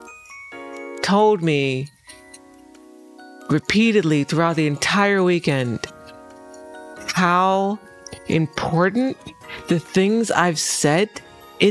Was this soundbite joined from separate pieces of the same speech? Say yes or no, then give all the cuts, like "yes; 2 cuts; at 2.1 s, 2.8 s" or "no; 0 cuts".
no; 0 cuts